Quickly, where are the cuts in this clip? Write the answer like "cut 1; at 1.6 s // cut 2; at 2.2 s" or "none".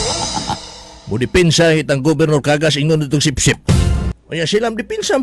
cut 1; at 4.2 s